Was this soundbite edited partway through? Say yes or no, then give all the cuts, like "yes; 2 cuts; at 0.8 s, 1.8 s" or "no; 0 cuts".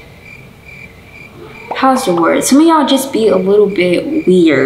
no; 0 cuts